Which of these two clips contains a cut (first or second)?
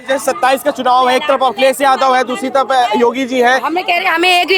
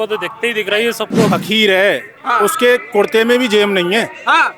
second